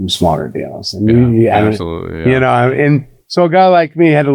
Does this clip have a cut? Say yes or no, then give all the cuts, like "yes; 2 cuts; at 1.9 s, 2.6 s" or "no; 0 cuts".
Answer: no; 0 cuts